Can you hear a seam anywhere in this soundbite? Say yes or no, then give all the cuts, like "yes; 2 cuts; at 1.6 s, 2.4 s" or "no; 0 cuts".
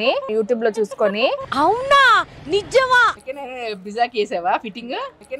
yes; 1 cut; at 3.2 s